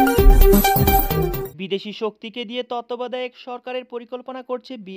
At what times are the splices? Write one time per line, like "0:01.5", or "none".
none